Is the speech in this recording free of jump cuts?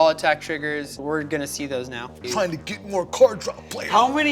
no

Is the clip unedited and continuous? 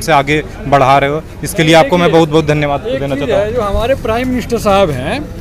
yes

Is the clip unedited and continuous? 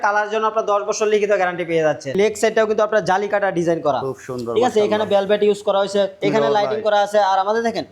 no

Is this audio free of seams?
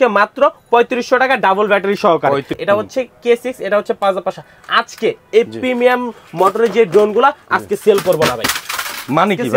no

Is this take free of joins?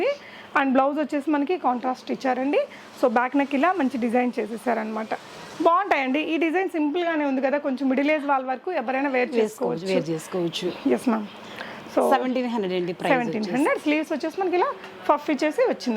yes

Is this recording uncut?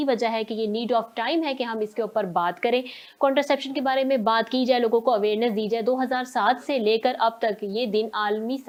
yes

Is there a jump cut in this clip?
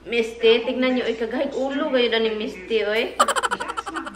no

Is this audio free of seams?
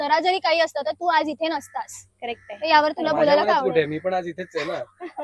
yes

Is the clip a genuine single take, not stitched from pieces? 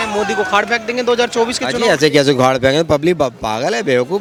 yes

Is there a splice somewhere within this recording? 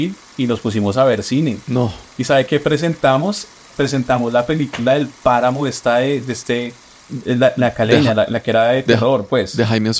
no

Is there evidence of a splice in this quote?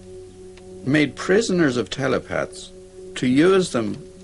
no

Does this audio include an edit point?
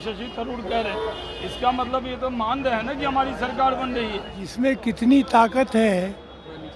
yes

